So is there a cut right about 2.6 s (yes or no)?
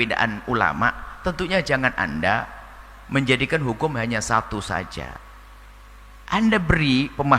no